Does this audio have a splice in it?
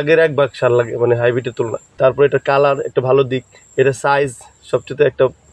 yes; 1 cut; at 1.9 s

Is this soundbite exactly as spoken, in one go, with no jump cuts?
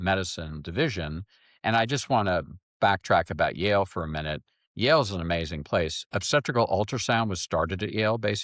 yes; 0 cuts

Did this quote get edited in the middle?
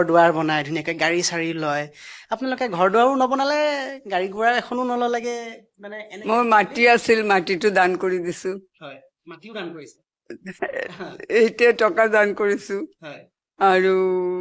no; 0 cuts

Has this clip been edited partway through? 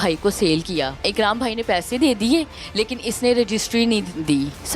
yes; 1 cut; at 1.1 s

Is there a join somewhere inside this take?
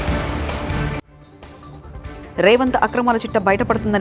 yes; 1 cut; at 2.2 s

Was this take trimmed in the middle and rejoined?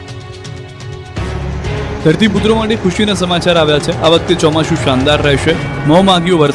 no; 0 cuts

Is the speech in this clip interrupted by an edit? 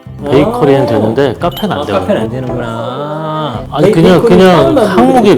yes; 1 cut; at 3.6 s

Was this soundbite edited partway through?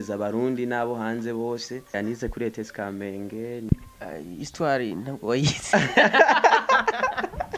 yes; 2 cuts; at 1.9 s, 3.7 s

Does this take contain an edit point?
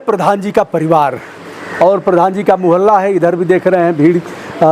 no; 0 cuts

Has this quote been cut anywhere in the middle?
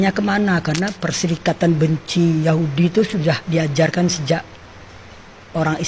no; 0 cuts

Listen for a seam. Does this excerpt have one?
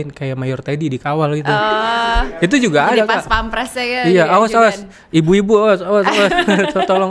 no; 0 cuts

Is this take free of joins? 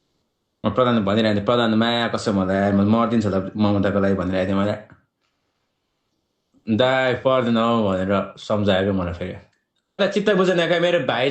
no; 1 cut; at 10.0 s

